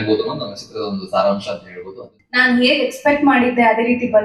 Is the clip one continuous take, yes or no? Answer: no